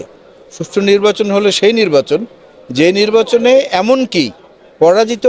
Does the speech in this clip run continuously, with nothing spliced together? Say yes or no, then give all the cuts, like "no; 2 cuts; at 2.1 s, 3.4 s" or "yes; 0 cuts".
yes; 0 cuts